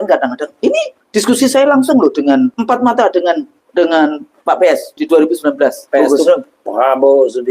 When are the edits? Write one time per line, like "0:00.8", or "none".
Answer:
0:01.0
0:02.6
0:03.5
0:04.9
0:05.8